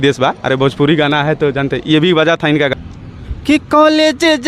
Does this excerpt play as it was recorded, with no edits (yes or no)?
no